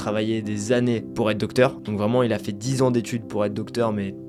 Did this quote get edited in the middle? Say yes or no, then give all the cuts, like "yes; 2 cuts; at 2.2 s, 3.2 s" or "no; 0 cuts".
no; 0 cuts